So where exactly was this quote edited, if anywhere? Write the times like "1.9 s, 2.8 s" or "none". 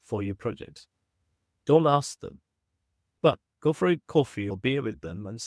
none